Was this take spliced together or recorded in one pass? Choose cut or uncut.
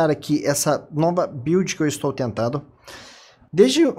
cut